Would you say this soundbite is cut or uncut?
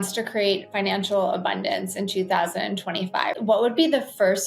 cut